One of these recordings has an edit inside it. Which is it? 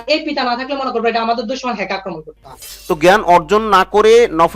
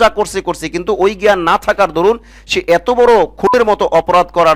first; 1 cut; at 2.7 s

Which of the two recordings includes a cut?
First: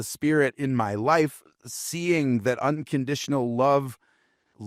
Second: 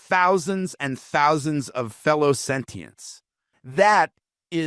second; 1 cut; at 3.6 s

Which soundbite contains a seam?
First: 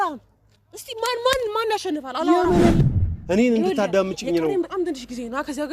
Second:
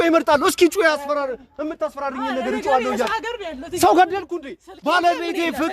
first; 1 cut; at 2.8 s

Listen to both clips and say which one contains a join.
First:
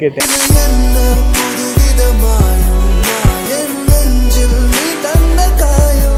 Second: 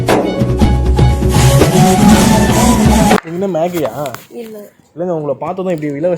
second; 1 cut; at 3.2 s

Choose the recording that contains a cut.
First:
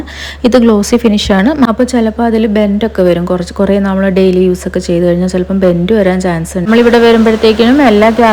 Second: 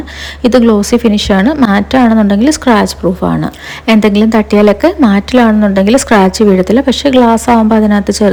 first; 2 cuts; at 1.7 s, 6.7 s

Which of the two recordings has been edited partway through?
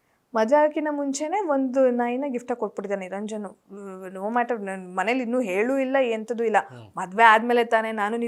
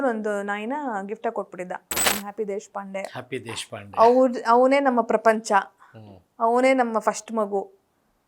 second; 1 cut; at 2.1 s

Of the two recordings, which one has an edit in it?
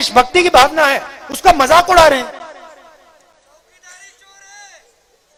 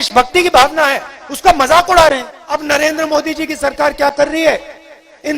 second; 1 cut; at 2.3 s

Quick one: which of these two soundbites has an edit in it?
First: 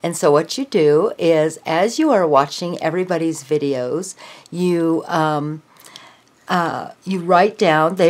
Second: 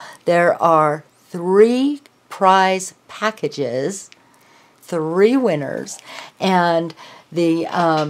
second; 1 cut; at 4.5 s

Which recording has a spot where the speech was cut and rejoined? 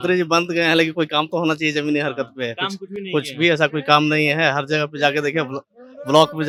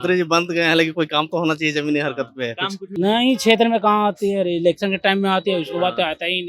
second; 1 cut; at 2.8 s

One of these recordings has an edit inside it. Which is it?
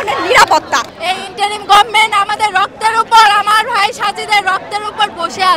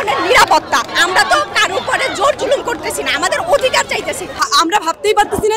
first; 1 cut; at 0.9 s

